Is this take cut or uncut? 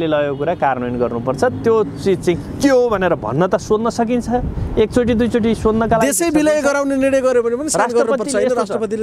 uncut